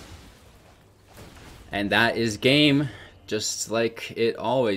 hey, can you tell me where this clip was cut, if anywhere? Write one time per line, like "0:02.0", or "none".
0:01.6

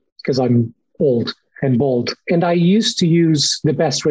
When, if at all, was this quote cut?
0:02.2

